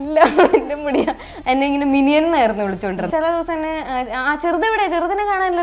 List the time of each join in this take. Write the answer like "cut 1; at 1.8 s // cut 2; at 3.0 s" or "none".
cut 1; at 1.3 s // cut 2; at 3.1 s